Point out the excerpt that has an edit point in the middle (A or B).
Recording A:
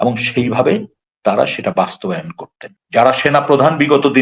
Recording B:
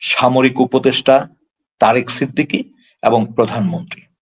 A